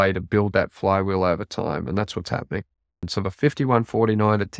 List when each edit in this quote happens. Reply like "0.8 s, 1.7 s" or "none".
3.1 s

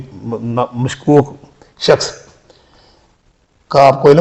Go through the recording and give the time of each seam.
none

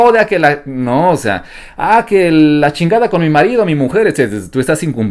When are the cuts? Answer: none

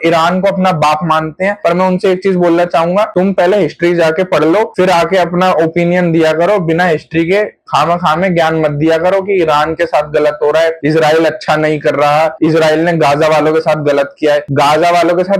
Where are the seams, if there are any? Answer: none

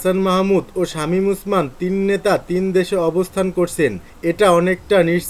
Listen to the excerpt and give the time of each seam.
none

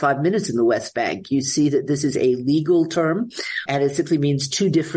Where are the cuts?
none

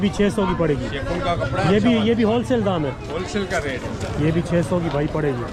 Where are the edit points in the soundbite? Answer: none

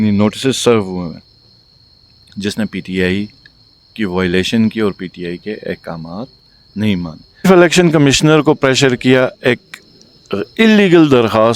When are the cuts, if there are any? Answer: 7.5 s

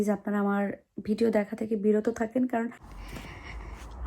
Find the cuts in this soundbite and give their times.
3.0 s

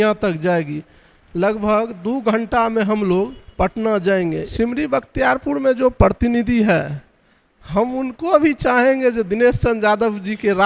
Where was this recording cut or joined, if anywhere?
4.5 s

